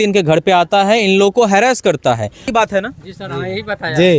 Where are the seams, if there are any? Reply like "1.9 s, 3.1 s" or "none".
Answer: 2.5 s

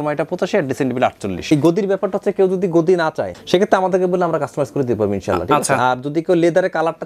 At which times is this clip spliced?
1.5 s, 3.4 s

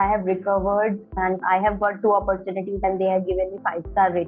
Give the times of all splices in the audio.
1.2 s, 2.8 s

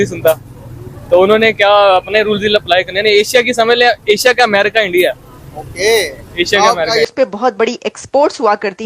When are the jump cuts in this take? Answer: 7.1 s

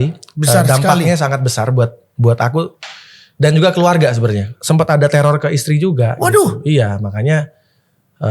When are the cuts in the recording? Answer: 4.5 s

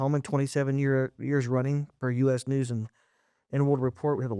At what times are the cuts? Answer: none

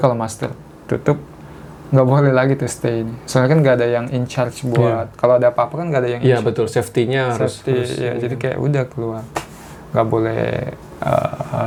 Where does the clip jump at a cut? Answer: none

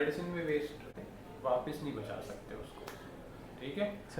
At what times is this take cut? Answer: 0.9 s

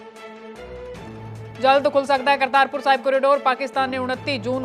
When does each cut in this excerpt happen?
1.5 s

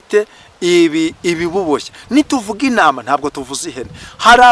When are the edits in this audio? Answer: none

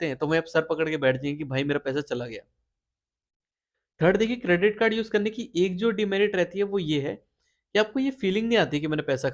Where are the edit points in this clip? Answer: none

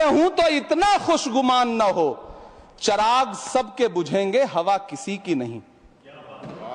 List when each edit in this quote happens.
none

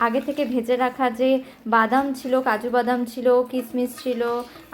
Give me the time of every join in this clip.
none

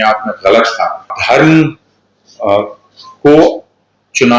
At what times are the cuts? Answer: 1.2 s

